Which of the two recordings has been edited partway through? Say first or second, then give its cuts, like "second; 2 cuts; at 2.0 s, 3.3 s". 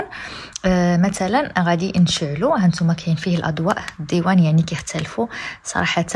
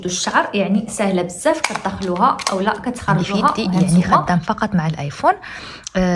second; 1 cut; at 3.9 s